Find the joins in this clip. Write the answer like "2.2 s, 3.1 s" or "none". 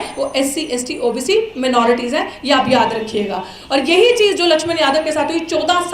none